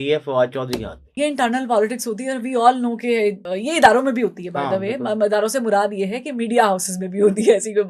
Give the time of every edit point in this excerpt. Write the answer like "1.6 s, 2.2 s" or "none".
1.1 s, 3.5 s

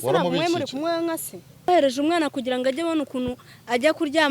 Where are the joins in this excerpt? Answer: 1.7 s

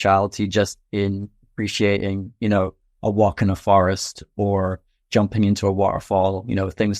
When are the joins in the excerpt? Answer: none

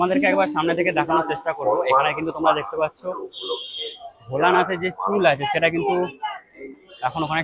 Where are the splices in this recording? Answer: none

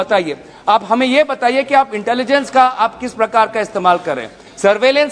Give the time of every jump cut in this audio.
none

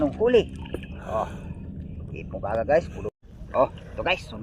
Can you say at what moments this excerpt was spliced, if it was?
3.1 s

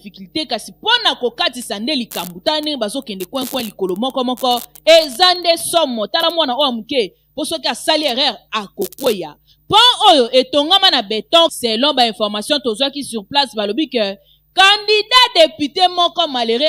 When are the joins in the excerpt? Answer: none

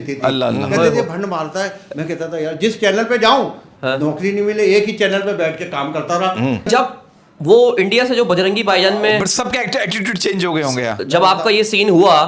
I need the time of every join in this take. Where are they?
6.7 s

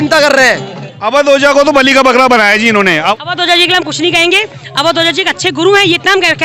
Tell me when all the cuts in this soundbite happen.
1.0 s, 3.0 s

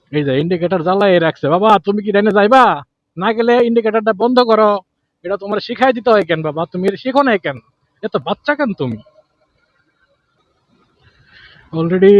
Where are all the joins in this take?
none

